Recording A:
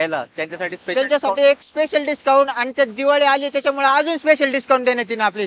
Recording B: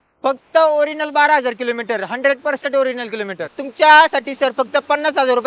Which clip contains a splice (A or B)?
B